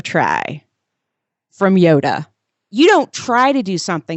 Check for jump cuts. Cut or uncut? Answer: cut